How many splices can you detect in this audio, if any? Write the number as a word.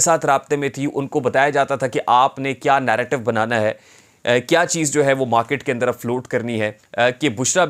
one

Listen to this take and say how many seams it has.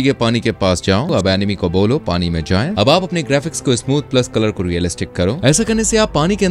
three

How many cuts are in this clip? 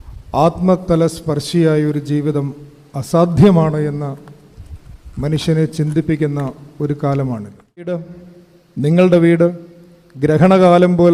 one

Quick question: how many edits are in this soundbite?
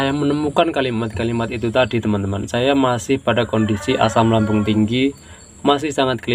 zero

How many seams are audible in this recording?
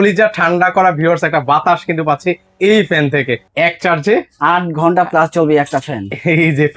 one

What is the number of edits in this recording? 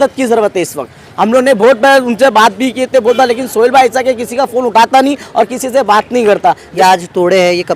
one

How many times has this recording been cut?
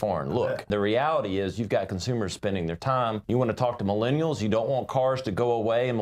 two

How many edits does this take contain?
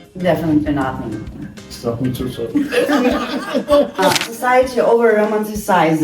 two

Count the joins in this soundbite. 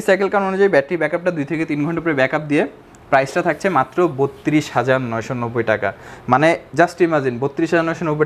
zero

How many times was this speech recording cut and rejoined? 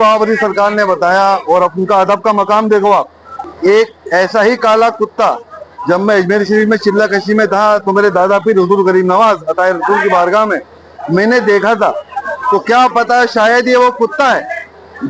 one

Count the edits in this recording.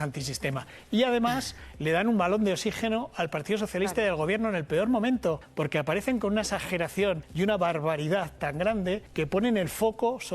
three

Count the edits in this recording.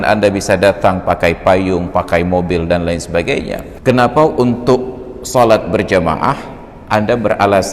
one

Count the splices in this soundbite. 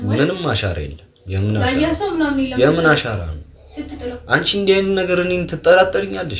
zero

